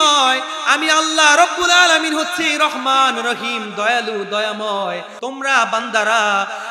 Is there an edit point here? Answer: yes; 1 cut; at 5.1 s

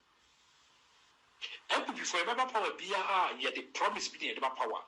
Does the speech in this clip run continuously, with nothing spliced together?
yes; 0 cuts

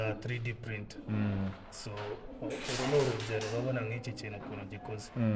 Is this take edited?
no; 0 cuts

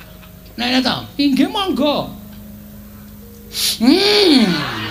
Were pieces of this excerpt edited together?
no; 0 cuts

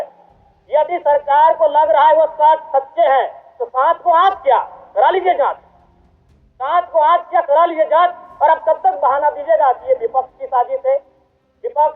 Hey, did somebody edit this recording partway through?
no; 0 cuts

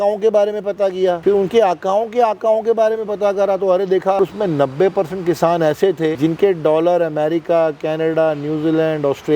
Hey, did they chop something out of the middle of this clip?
yes; 3 cuts; at 1.2 s, 4.2 s, 6.1 s

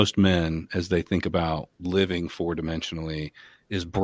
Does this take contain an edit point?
yes; 1 cut; at 1.7 s

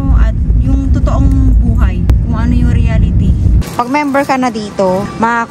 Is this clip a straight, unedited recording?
no; 1 cut; at 3.6 s

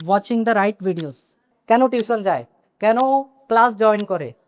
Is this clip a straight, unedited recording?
no; 1 cut; at 1.5 s

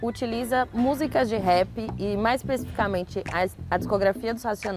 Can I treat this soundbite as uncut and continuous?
yes; 0 cuts

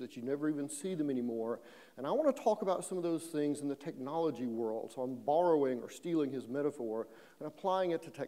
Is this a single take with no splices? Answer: no; 1 cut; at 1.2 s

